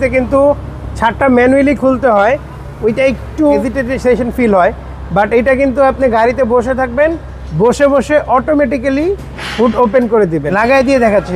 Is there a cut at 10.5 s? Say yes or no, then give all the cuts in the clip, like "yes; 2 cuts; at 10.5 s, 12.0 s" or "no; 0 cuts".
yes; 2 cuts; at 3.6 s, 10.5 s